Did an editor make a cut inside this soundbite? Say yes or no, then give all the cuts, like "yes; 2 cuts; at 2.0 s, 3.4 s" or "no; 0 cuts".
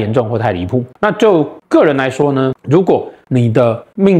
yes; 2 cuts; at 0.9 s, 3.2 s